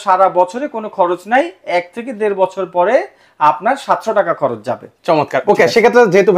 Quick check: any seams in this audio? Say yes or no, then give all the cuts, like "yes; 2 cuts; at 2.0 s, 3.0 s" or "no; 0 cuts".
no; 0 cuts